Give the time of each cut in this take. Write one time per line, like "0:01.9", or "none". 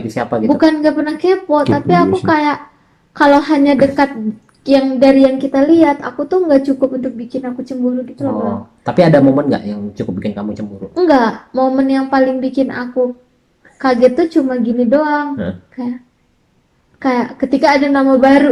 none